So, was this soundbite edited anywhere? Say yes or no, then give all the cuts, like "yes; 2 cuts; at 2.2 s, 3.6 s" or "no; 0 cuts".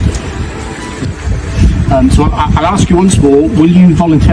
yes; 1 cut; at 1.1 s